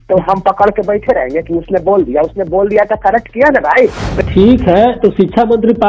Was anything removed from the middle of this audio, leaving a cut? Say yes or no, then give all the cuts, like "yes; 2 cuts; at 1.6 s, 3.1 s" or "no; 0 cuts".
yes; 1 cut; at 4.0 s